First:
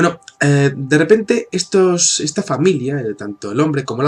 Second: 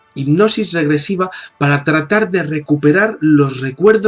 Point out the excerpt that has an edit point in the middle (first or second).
second